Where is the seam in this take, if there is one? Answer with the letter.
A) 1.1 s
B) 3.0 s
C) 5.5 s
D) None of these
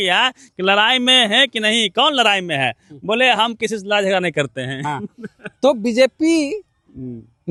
D